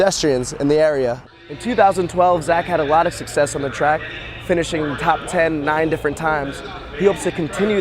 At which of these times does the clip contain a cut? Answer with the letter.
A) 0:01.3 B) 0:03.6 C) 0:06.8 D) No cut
A